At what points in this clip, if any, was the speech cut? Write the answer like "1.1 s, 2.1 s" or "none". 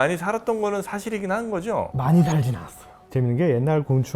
none